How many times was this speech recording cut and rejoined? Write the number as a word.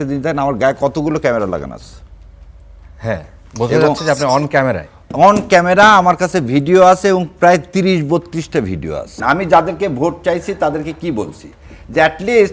one